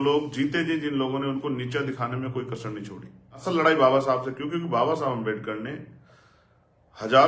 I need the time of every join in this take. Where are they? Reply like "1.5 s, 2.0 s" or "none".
3.4 s